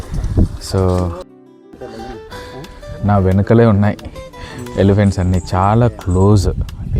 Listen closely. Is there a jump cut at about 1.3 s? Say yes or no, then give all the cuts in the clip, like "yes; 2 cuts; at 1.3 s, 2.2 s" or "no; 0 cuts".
yes; 1 cut; at 1.3 s